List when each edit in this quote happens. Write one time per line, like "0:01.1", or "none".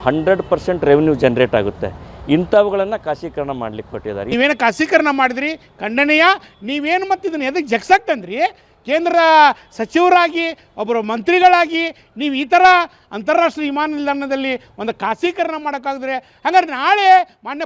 0:04.2